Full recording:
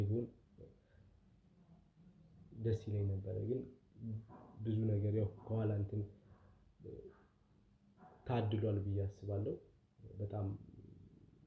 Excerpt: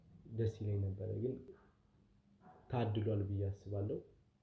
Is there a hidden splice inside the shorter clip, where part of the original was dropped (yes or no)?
yes